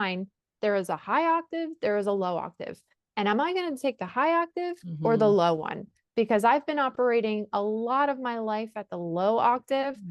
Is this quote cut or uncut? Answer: uncut